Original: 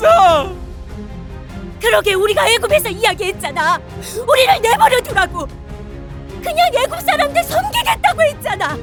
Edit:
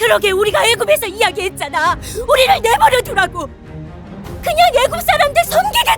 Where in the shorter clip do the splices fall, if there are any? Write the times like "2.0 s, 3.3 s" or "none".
2.1 s

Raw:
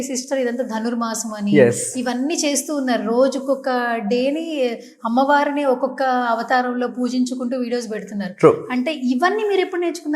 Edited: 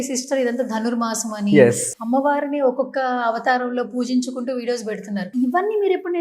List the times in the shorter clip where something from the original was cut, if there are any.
1.9 s, 5.3 s

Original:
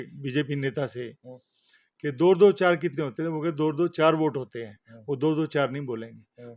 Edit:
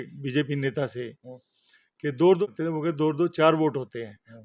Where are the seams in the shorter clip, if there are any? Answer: 2.4 s

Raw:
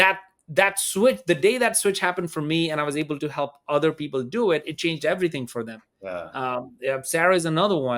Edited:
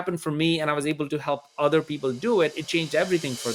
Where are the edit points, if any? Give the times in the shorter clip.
none

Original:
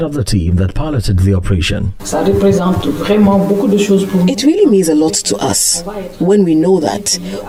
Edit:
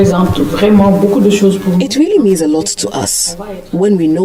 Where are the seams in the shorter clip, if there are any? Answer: none

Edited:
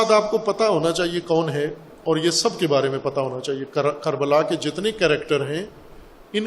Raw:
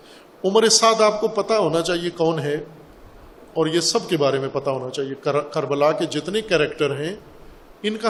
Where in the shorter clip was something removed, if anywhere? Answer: 1.9 s

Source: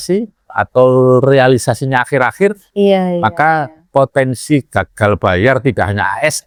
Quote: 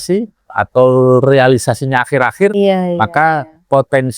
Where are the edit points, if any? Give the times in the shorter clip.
2.5 s

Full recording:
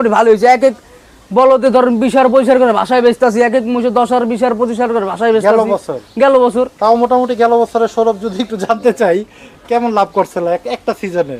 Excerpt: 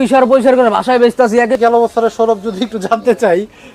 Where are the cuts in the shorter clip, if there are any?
1.6 s

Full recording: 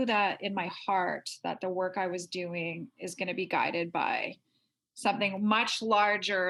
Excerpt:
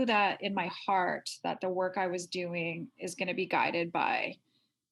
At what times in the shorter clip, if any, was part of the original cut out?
none

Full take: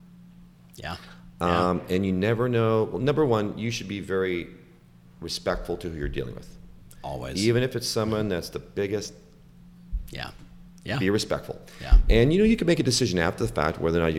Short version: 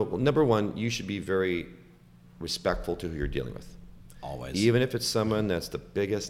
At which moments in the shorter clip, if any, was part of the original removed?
none

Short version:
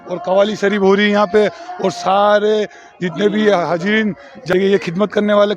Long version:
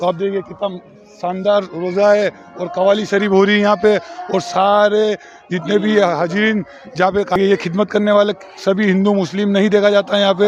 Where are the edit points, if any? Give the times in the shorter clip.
4.5 s

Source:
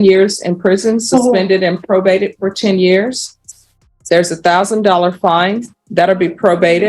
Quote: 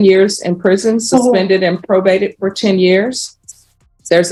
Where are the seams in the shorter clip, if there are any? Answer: none

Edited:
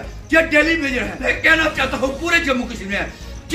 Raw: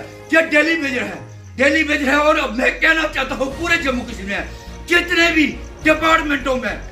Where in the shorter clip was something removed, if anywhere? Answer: 1.3 s

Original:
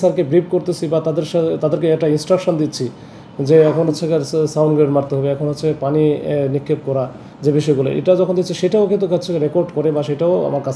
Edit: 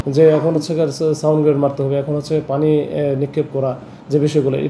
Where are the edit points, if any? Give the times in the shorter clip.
none

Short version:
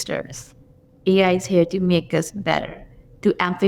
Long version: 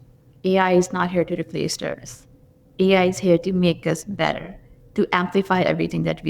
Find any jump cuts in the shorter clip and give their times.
none

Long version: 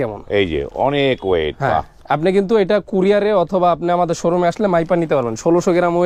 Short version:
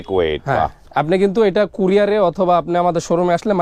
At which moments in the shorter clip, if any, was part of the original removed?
none

